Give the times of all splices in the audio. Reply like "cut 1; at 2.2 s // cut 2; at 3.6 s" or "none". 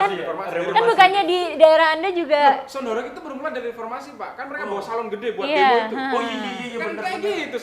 none

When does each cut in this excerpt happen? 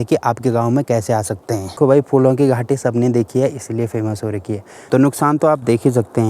cut 1; at 1.8 s // cut 2; at 4.8 s

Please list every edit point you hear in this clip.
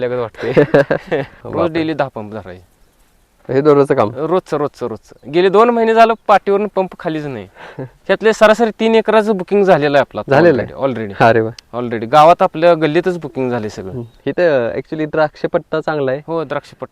cut 1; at 1.4 s // cut 2; at 7.9 s

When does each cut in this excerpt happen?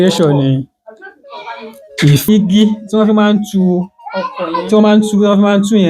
cut 1; at 2.3 s

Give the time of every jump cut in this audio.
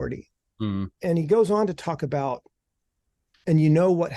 cut 1; at 0.9 s

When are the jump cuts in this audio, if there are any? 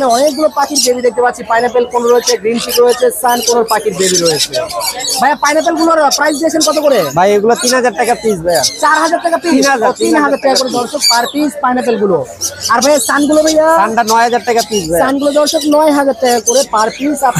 none

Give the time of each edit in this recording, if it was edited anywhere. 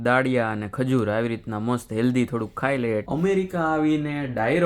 cut 1; at 3.1 s

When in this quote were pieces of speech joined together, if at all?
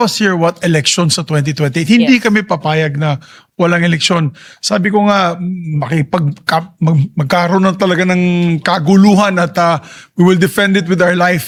none

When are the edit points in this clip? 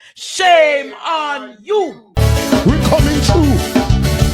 cut 1; at 2.0 s

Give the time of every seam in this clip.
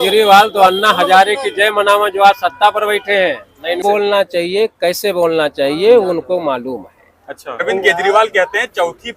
cut 1; at 3.8 s // cut 2; at 7.6 s

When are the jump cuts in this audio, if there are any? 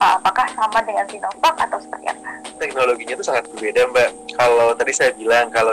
cut 1; at 2.7 s

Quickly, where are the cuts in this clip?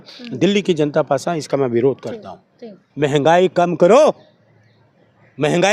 cut 1; at 2.8 s

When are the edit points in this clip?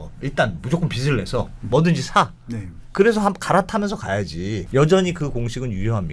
cut 1; at 4.6 s

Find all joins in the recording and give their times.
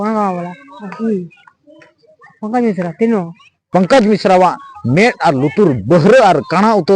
cut 1; at 3.6 s

